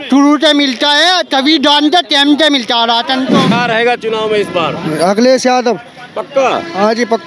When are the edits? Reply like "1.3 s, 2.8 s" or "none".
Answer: 3.5 s